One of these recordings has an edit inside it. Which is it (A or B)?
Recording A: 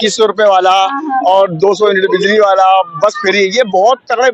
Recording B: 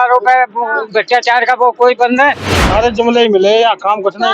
B